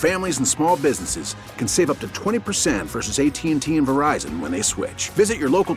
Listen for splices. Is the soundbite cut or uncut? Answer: uncut